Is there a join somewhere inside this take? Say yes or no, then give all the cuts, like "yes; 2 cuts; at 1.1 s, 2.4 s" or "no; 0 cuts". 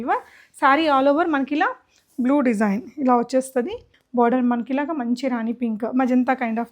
yes; 1 cut; at 3.9 s